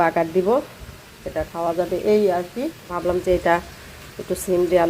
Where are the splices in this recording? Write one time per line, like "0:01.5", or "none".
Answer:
0:02.9